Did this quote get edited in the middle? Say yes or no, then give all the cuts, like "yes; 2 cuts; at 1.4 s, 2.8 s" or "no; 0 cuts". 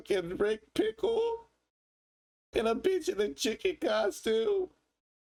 no; 0 cuts